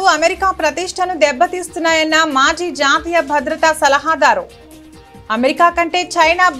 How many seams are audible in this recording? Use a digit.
0